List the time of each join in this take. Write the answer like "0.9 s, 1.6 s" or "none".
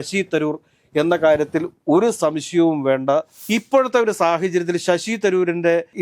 3.4 s